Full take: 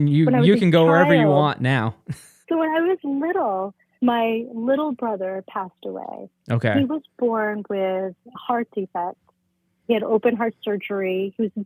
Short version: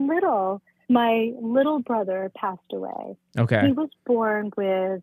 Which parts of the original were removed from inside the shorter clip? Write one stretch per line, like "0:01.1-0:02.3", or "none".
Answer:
none